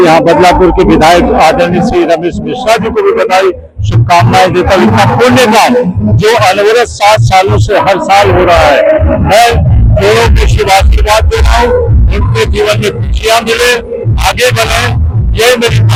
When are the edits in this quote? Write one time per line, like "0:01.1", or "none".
none